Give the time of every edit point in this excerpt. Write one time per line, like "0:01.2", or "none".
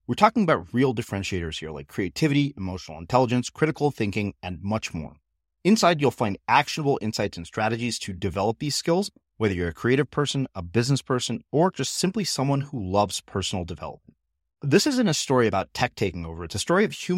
none